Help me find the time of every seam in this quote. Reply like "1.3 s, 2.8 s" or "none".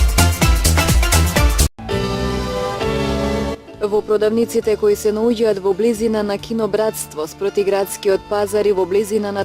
1.6 s